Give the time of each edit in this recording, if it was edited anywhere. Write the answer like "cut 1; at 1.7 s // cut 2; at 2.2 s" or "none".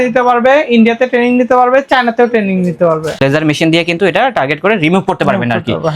cut 1; at 3.2 s